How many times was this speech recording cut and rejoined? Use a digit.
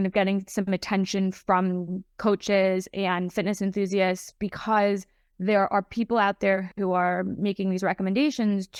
0